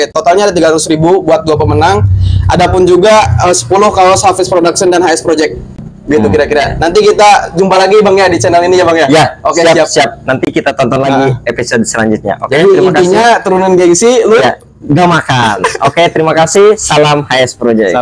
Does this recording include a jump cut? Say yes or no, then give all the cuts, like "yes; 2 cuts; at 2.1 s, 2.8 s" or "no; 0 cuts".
no; 0 cuts